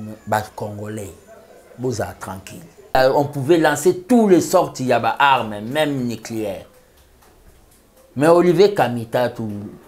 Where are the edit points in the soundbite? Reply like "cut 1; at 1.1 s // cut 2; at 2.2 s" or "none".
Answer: cut 1; at 2.9 s